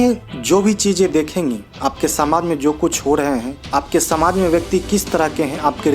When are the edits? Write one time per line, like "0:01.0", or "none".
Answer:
0:03.6

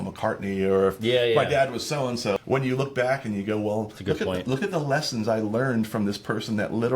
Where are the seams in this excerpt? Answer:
0:02.4

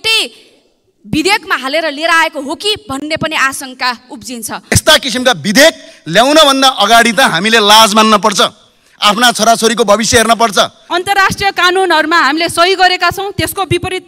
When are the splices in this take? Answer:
0:04.7
0:10.8

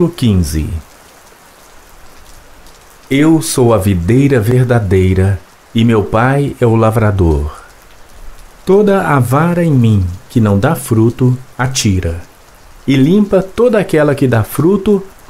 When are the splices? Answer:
0:00.8
0:03.1

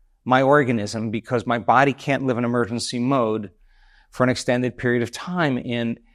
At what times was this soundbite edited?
none

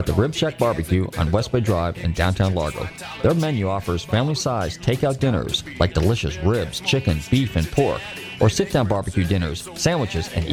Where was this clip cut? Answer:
none

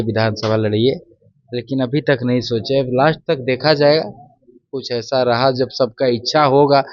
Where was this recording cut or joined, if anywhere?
none

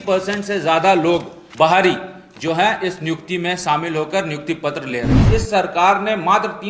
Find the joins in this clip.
0:01.4
0:05.2

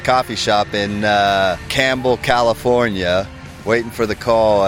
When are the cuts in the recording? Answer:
0:01.7

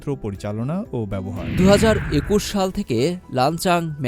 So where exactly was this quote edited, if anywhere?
0:01.5

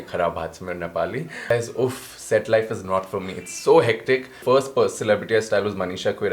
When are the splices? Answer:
0:01.5
0:04.3

